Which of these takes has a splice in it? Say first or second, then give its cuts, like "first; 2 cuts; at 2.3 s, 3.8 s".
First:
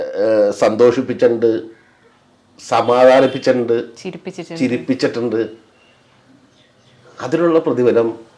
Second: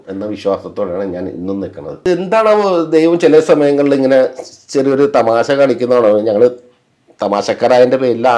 second; 1 cut; at 2.1 s